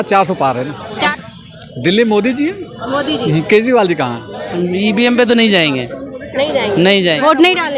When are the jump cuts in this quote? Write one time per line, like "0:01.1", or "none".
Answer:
0:01.1
0:04.4